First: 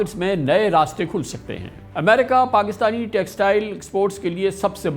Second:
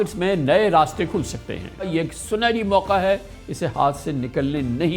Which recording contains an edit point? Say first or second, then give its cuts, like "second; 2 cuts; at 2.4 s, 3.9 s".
second; 1 cut; at 1.9 s